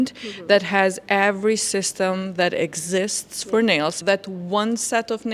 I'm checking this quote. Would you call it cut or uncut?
cut